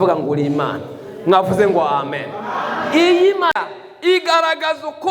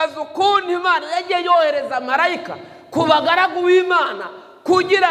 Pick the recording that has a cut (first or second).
first